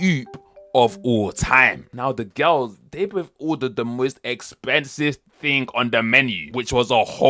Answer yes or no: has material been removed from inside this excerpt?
yes